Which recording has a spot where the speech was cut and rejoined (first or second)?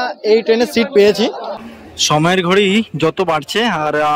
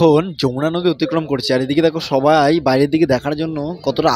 first